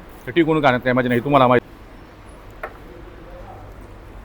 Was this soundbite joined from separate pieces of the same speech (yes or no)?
yes